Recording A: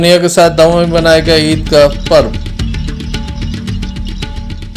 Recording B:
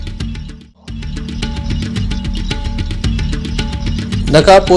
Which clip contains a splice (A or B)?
B